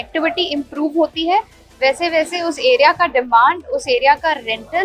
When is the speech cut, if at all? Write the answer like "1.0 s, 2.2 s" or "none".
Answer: none